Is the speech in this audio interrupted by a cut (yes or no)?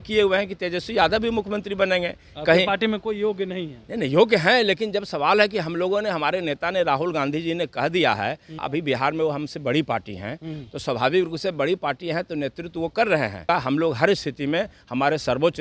yes